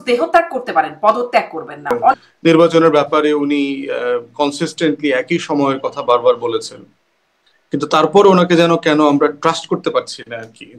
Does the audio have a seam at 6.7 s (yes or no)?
no